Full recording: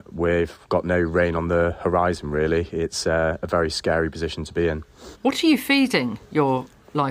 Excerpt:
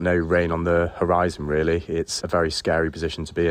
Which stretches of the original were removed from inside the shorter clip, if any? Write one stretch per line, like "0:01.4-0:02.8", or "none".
0:03.0-0:03.4